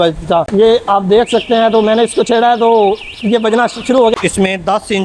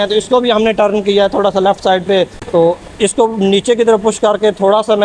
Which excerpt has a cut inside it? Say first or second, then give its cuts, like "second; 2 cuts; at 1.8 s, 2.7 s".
first; 1 cut; at 4.1 s